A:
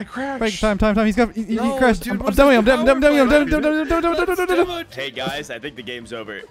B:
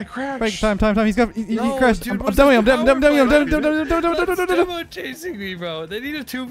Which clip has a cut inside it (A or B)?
A